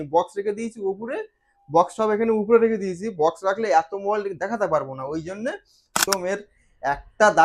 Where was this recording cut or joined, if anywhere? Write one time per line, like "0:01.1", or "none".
0:06.0